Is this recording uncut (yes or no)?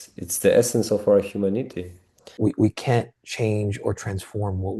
no